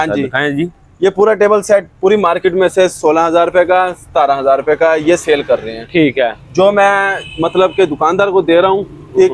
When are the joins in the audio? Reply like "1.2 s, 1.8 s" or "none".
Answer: none